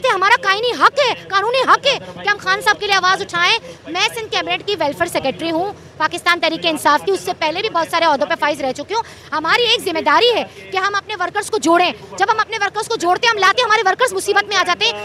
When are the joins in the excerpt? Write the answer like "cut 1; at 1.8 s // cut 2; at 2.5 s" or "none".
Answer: none

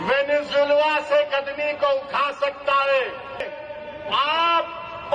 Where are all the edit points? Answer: cut 1; at 3.5 s

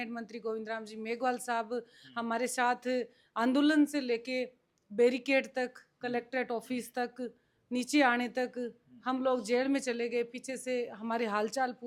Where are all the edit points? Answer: none

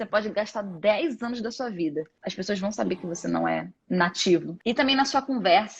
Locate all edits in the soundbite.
cut 1; at 2.2 s // cut 2; at 3.7 s // cut 3; at 4.5 s

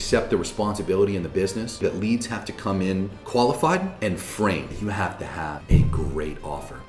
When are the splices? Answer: cut 1; at 1.8 s // cut 2; at 4.7 s

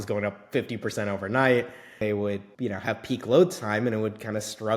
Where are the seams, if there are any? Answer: cut 1; at 2.1 s

